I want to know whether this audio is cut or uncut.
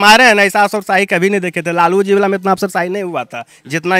uncut